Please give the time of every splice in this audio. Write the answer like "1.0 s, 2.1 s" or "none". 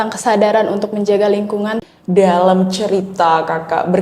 1.8 s